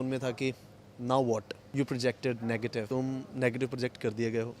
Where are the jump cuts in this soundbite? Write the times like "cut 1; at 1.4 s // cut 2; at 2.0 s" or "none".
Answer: cut 1; at 1.6 s // cut 2; at 2.9 s